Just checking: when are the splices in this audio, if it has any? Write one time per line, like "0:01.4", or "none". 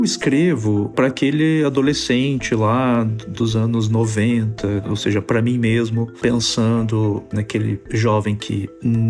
0:00.9